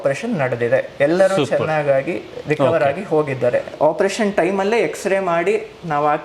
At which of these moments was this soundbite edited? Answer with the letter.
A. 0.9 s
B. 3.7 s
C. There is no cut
B